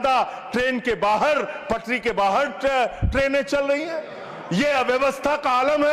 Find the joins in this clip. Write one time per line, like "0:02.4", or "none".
none